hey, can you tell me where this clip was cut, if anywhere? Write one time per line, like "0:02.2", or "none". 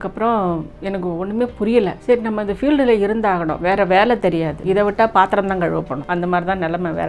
0:02.0
0:04.5
0:06.0